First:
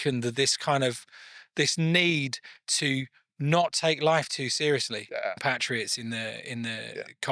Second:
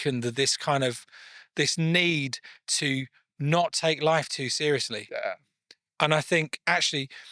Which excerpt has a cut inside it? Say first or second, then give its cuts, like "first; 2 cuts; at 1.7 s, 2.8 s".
first; 1 cut; at 5.4 s